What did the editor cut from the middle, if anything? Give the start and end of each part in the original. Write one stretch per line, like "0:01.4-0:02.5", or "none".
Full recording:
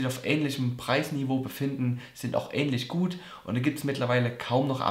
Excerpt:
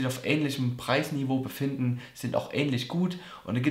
none